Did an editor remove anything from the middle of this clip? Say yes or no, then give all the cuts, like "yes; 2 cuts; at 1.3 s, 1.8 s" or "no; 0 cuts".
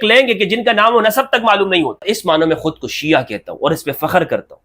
yes; 1 cut; at 2.0 s